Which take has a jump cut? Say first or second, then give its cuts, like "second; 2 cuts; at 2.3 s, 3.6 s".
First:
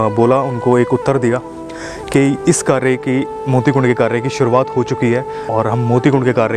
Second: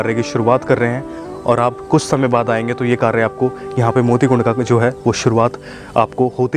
first; 1 cut; at 5.4 s